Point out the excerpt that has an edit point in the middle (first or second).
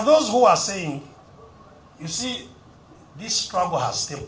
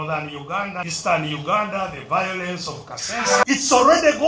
second